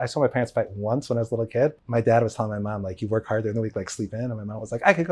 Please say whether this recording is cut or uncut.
cut